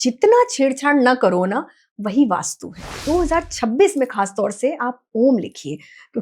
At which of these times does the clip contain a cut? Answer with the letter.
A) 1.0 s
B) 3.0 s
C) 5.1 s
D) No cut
B